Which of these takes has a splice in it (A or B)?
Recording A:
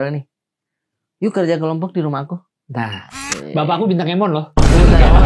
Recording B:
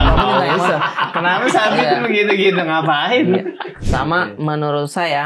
B